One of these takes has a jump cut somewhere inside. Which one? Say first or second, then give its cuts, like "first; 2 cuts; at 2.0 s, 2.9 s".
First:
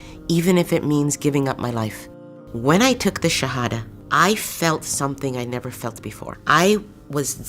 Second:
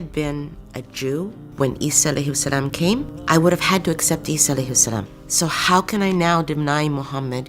first; 1 cut; at 2.2 s